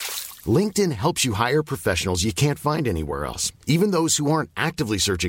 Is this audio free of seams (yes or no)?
yes